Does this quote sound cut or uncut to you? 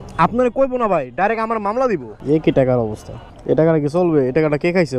cut